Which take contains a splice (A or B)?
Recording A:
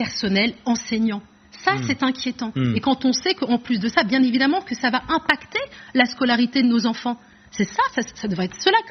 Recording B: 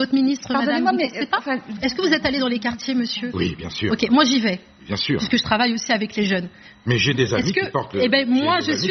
B